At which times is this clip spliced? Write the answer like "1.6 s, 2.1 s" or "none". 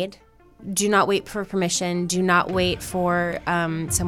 none